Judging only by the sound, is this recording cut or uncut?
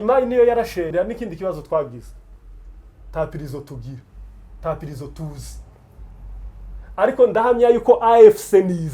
cut